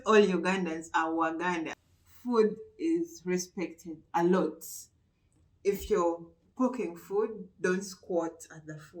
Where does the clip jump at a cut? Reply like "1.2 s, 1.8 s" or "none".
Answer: 1.7 s

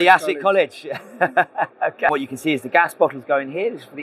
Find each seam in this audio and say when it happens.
2.1 s

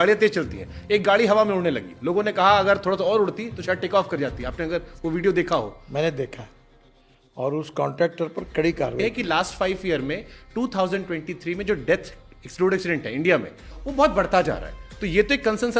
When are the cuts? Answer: 9.0 s, 13.8 s

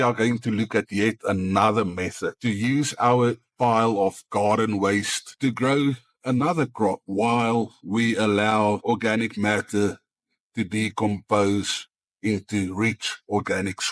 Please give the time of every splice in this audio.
3.5 s, 7.0 s, 8.8 s

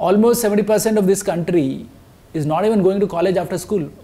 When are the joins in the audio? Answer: none

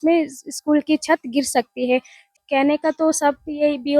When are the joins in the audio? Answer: 2.3 s

